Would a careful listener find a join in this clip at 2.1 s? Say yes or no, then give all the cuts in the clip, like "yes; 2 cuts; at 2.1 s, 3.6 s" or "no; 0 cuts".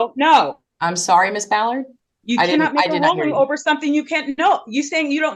no; 0 cuts